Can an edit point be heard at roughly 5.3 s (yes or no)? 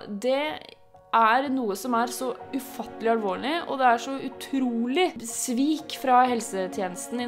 yes